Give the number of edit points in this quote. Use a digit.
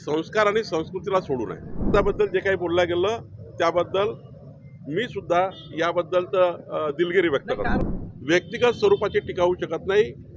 2